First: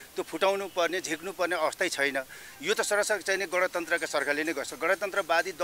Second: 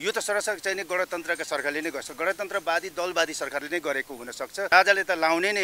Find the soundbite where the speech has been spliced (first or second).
second